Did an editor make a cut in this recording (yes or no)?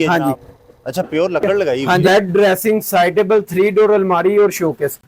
yes